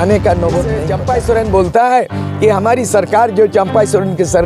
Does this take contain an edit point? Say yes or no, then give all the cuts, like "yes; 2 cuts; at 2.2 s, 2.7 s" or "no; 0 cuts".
yes; 1 cut; at 0.9 s